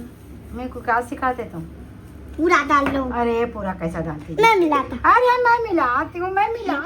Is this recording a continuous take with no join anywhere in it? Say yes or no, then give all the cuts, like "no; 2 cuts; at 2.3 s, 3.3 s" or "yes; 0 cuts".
yes; 0 cuts